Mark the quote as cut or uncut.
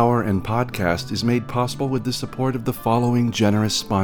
uncut